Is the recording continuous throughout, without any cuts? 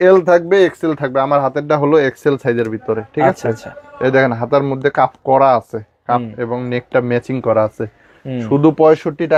yes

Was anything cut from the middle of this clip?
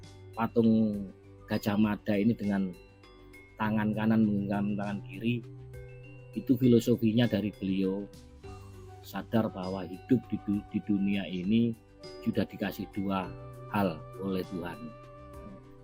no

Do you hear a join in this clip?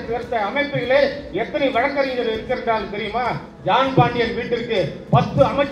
yes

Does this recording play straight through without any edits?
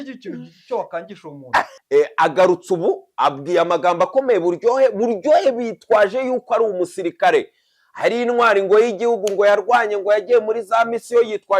no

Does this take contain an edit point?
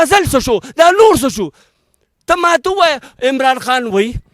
no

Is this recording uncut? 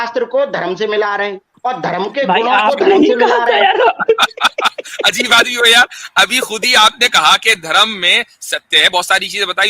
no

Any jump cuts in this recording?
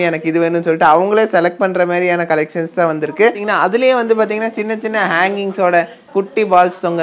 yes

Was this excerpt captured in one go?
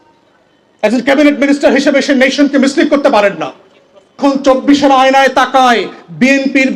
no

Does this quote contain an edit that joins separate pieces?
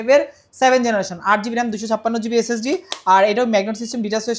no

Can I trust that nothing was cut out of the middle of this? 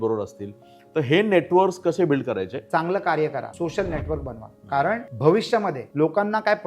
no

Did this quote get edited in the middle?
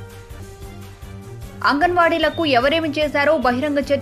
yes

